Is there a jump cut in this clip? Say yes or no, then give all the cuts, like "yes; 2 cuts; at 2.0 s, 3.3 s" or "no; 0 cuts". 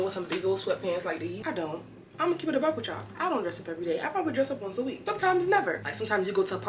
yes; 2 cuts; at 1.4 s, 5.8 s